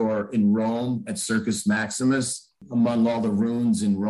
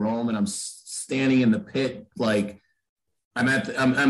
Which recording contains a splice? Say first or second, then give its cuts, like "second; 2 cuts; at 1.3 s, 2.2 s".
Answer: first; 1 cut; at 2.6 s